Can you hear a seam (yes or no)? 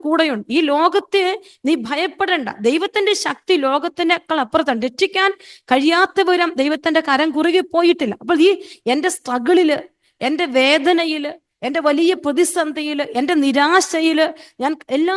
no